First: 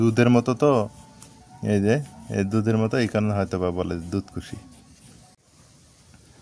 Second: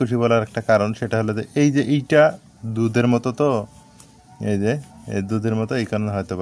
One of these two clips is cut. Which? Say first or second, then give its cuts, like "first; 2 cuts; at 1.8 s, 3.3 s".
first; 1 cut; at 5.3 s